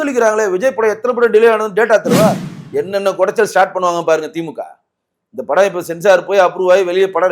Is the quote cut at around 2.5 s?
yes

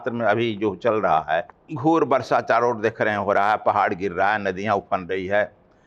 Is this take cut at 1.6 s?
yes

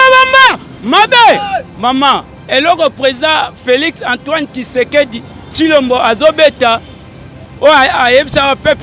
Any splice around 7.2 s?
no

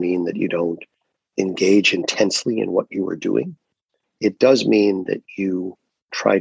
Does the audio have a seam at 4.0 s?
no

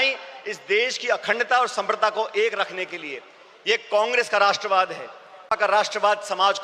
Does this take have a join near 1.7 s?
no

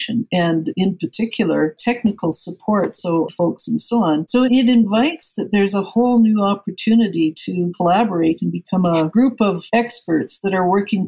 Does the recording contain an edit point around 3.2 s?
no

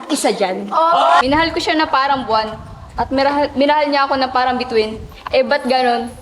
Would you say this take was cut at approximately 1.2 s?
yes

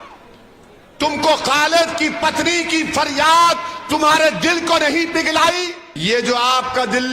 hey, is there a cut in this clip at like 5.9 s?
yes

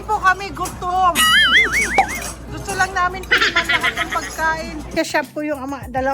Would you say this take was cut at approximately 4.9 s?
yes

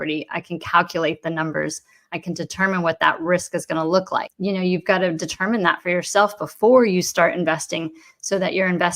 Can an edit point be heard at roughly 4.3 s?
yes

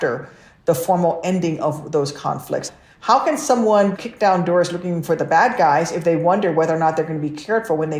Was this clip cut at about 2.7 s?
yes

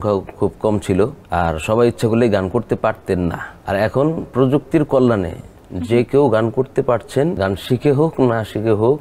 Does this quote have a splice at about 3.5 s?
yes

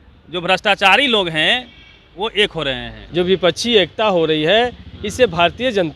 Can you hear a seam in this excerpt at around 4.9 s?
no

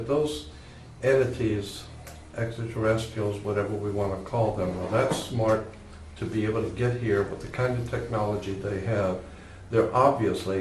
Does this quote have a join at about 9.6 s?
no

